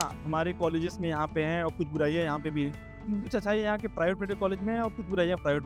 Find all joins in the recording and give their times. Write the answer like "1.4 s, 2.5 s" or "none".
none